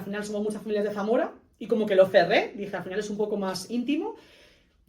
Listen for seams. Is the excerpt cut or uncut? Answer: uncut